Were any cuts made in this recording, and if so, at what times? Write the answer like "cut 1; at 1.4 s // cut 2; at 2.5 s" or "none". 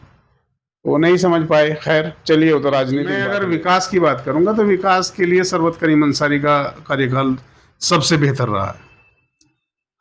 cut 1; at 3.1 s